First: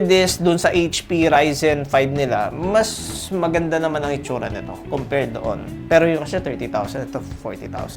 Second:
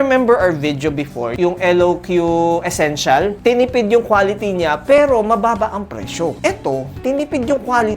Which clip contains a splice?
second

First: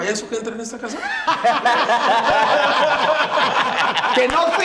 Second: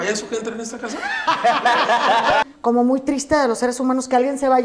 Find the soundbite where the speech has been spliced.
second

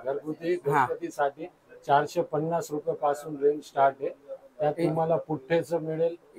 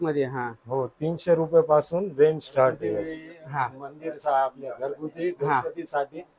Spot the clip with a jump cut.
second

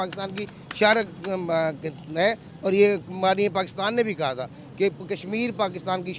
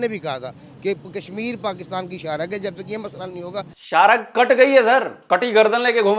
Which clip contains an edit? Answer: second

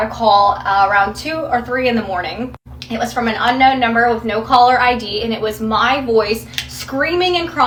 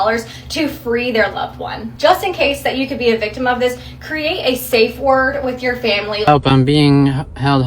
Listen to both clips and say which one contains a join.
second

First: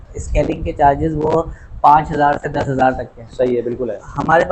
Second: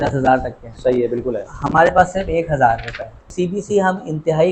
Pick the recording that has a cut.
second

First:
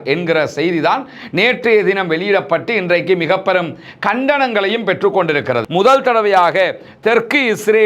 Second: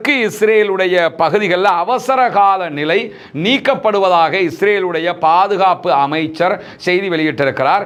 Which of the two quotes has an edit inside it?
first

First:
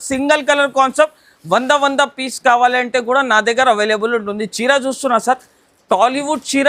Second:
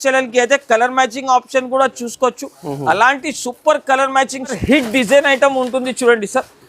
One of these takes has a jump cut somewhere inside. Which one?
second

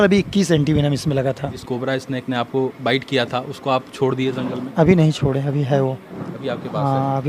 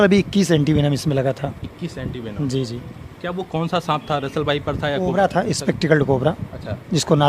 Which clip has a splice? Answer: first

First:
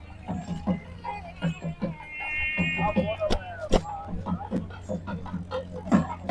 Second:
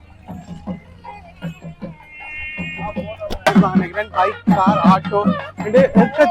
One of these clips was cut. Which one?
second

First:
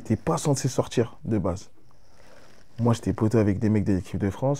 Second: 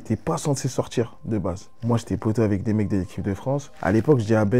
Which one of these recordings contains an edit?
second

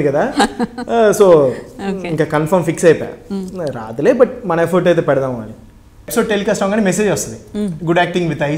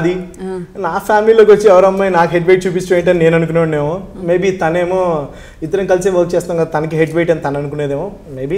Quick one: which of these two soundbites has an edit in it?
first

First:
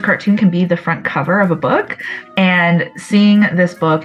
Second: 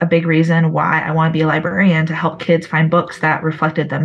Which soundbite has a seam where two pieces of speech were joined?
first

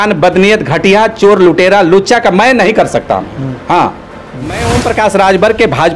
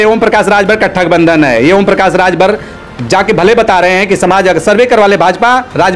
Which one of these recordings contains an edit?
first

